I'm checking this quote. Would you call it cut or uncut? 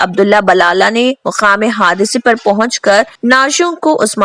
cut